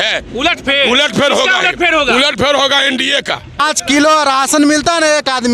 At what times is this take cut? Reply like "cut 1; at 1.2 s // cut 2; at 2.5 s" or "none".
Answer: cut 1; at 3.6 s